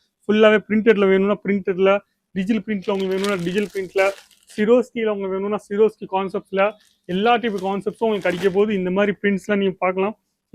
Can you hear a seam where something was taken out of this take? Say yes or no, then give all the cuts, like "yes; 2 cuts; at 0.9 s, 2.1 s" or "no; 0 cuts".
no; 0 cuts